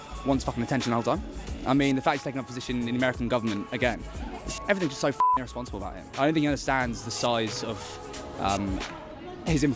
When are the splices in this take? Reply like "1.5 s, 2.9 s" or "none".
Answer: none

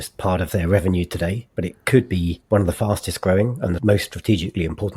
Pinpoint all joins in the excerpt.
1.4 s, 2.4 s, 3.8 s

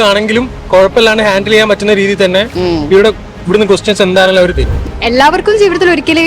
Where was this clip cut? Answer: 4.7 s

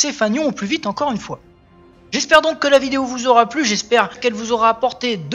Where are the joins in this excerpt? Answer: none

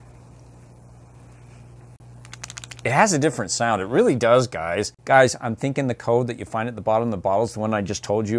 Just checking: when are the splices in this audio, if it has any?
2.0 s, 5.0 s

